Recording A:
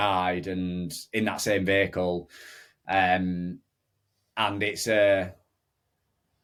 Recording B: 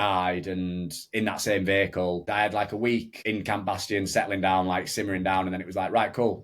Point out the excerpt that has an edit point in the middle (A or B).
B